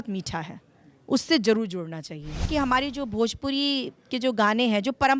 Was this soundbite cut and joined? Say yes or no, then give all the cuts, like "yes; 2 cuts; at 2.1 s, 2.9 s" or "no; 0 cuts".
yes; 1 cut; at 2.4 s